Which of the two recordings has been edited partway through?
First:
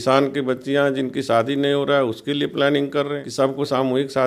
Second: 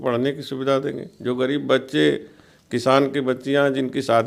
first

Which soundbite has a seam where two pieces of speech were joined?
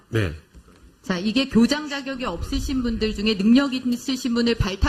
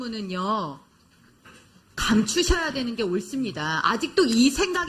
second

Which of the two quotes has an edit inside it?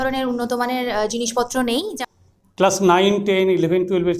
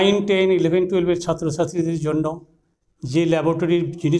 first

